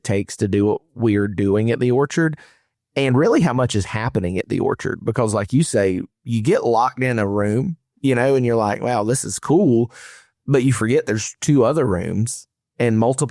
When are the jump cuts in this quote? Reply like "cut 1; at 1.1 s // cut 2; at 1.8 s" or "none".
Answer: none